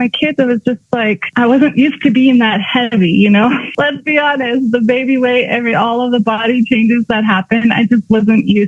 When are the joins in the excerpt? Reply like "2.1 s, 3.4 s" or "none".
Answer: 1.2 s, 3.7 s